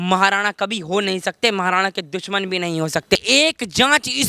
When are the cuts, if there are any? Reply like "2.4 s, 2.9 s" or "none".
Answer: 3.1 s